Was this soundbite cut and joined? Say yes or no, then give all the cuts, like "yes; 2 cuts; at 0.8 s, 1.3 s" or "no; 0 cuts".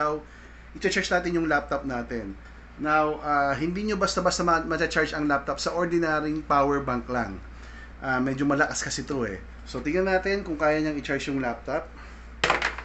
no; 0 cuts